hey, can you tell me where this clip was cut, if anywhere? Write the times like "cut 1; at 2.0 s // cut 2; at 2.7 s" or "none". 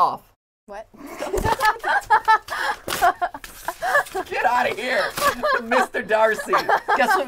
none